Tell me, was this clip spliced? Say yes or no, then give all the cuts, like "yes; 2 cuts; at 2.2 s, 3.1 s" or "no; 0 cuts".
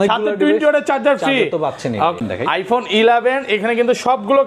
yes; 1 cut; at 2.2 s